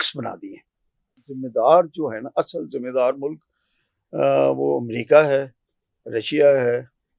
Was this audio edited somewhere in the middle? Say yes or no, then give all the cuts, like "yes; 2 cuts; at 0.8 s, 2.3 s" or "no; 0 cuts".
yes; 1 cut; at 1.2 s